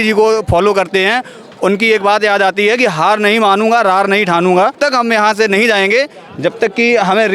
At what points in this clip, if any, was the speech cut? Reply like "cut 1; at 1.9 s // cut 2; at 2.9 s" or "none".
cut 1; at 4.8 s